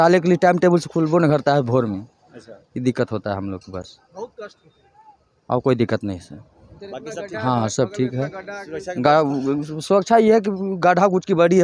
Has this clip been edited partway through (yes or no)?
no